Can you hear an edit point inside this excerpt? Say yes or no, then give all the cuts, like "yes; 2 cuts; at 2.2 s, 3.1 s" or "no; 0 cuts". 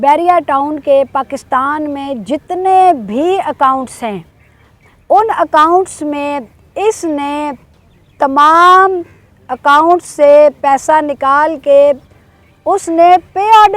no; 0 cuts